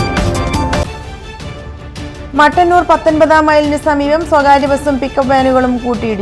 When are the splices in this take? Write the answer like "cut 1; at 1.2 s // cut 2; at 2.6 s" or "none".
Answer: cut 1; at 0.8 s // cut 2; at 0.9 s